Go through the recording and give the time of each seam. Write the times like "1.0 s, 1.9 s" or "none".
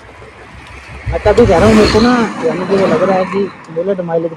none